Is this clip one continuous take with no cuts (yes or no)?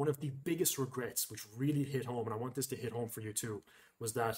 yes